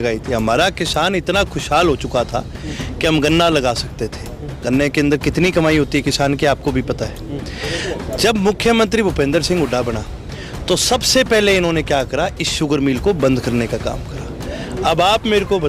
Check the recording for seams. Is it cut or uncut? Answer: uncut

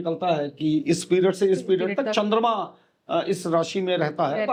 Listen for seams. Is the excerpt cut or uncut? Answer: uncut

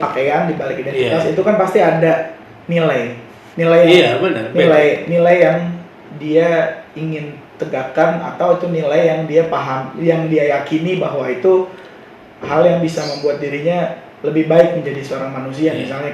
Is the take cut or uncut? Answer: uncut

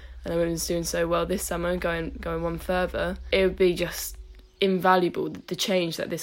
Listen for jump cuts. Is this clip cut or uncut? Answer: cut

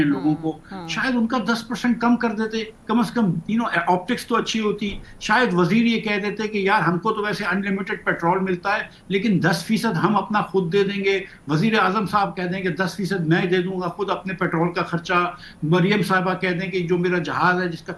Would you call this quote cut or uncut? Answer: uncut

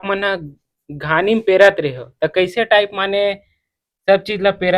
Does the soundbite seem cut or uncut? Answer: uncut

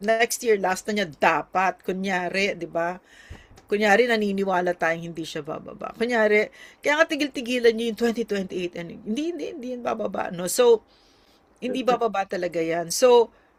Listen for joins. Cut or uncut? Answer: uncut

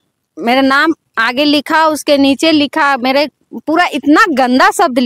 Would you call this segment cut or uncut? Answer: uncut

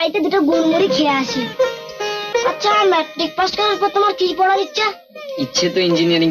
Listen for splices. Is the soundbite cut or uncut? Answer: cut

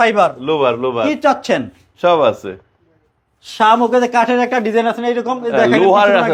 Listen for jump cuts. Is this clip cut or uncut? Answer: uncut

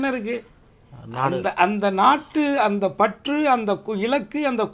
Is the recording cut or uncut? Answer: uncut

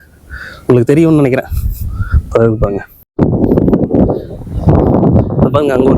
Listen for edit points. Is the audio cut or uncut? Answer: cut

